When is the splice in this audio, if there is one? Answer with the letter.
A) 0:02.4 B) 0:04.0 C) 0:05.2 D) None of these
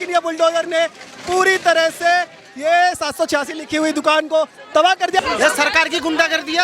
C